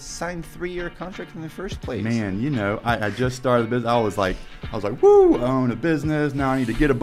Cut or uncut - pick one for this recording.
uncut